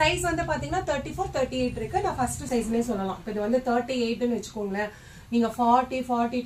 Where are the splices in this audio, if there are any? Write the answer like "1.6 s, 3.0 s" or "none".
2.5 s